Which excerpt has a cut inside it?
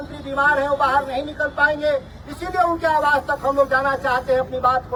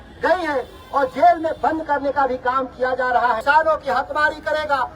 second; 1 cut; at 3.4 s

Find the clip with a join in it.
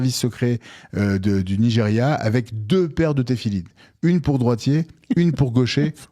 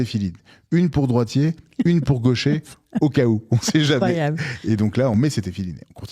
second; 1 cut; at 5.1 s

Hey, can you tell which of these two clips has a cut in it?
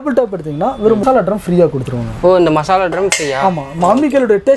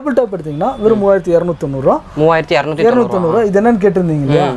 first; 1 cut; at 1.0 s

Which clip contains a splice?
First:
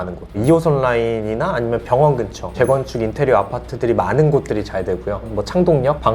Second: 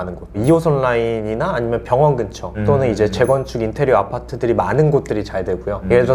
first; 2 cuts; at 2.5 s, 5.2 s

